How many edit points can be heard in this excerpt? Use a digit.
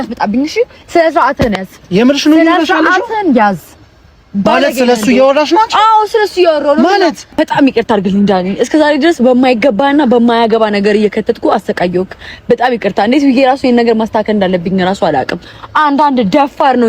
1